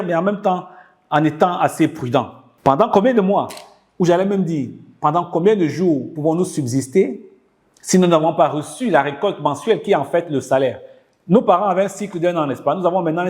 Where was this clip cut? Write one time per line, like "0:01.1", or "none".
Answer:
0:02.4